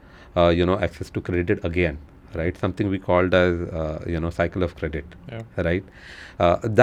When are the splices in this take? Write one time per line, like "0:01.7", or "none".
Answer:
none